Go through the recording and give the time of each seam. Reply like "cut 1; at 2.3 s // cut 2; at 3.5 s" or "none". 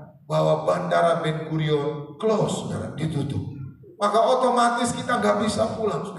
none

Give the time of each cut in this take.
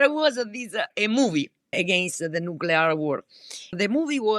cut 1; at 1.7 s

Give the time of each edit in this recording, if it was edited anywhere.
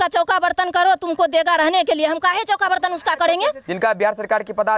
cut 1; at 3.7 s

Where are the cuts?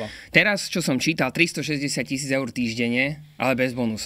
none

